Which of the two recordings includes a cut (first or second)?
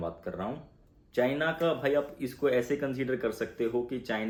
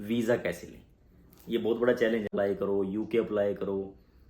second